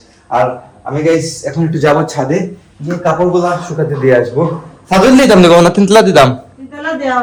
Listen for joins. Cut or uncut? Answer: uncut